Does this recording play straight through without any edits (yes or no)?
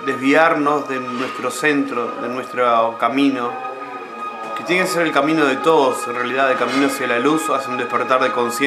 no